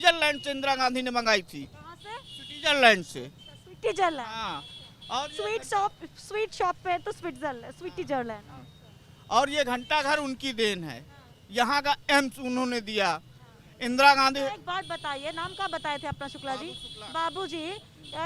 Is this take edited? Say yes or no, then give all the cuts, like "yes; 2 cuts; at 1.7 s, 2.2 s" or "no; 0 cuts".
no; 0 cuts